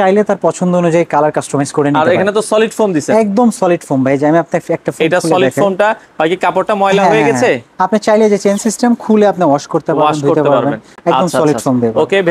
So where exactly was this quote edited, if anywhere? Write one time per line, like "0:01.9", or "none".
none